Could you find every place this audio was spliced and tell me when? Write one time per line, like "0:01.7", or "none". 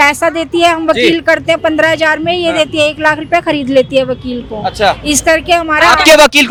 none